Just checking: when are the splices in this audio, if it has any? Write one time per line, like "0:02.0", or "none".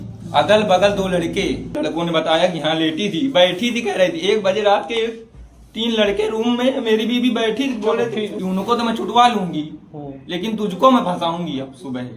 0:01.8
0:08.4